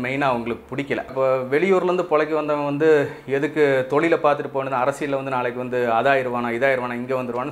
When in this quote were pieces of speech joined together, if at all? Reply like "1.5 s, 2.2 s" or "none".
1.1 s